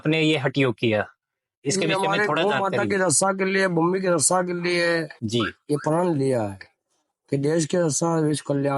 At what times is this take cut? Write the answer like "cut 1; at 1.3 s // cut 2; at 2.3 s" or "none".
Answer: none